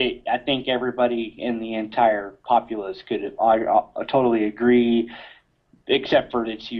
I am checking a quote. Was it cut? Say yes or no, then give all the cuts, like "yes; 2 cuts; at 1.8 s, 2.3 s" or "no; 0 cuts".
yes; 1 cut; at 0.9 s